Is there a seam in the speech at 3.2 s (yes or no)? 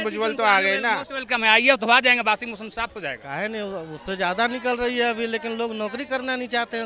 yes